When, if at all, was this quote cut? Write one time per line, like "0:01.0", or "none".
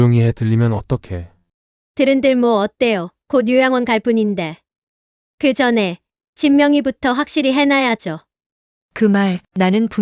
0:09.0